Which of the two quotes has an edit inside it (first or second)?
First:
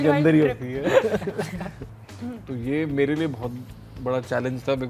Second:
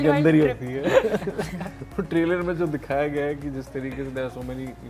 first